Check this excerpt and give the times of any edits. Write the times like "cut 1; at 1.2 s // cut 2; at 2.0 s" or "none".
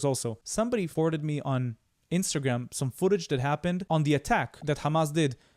cut 1; at 0.8 s // cut 2; at 3.8 s // cut 3; at 4.6 s